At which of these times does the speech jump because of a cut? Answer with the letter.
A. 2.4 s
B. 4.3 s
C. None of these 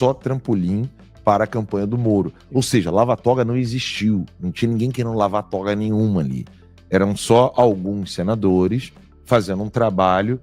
A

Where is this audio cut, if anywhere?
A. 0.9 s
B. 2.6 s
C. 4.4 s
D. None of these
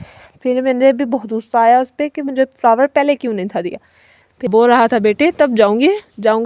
C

